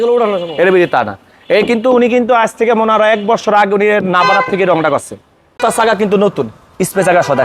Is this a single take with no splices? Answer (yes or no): no